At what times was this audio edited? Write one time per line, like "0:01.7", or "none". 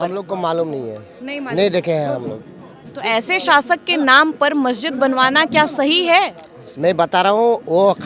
none